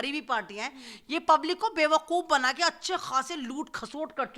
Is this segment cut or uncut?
uncut